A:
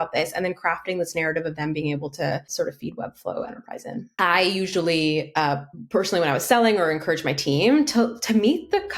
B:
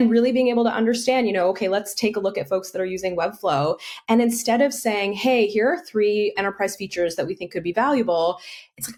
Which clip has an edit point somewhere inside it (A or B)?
A